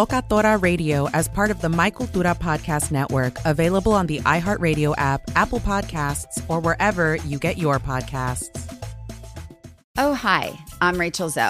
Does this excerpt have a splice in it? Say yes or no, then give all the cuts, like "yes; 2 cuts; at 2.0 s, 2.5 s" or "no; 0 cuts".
yes; 1 cut; at 9.9 s